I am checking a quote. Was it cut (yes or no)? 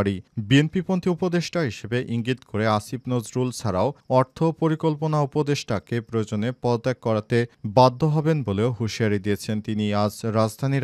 no